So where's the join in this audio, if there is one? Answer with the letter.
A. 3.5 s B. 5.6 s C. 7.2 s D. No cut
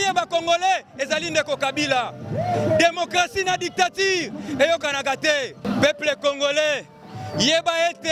B